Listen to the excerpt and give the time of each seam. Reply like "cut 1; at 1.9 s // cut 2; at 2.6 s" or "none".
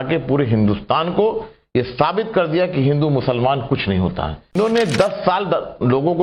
cut 1; at 4.5 s